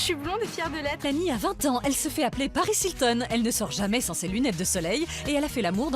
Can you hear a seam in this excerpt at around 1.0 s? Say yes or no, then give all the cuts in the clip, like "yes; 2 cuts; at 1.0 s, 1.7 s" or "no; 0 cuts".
yes; 1 cut; at 1.0 s